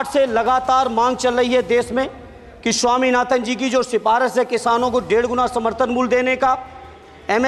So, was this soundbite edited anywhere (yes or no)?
no